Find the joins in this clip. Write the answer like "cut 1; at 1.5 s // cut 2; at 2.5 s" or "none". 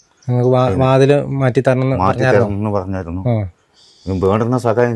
none